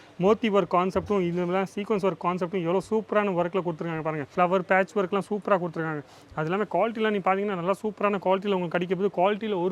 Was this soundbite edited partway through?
yes; 1 cut; at 4.2 s

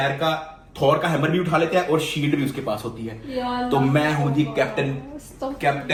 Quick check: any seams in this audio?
no; 0 cuts

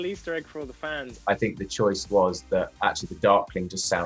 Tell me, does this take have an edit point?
yes; 1 cut; at 1.1 s

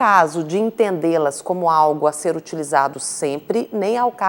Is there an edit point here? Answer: no; 0 cuts

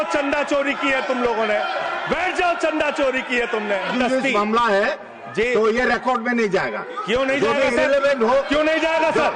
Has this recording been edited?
yes; 1 cut; at 3.9 s

